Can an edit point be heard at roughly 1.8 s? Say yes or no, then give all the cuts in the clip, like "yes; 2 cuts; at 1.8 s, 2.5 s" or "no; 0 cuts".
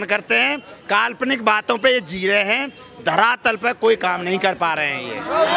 no; 0 cuts